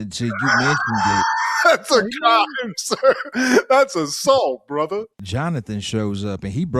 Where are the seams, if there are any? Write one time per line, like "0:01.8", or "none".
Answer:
0:05.2